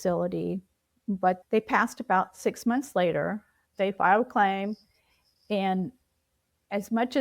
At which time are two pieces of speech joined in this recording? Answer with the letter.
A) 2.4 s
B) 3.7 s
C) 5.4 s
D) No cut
B